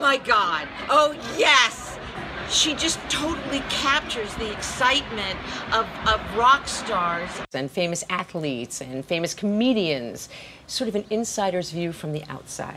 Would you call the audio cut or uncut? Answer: uncut